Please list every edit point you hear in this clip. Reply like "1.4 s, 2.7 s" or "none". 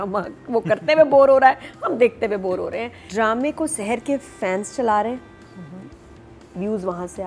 3.0 s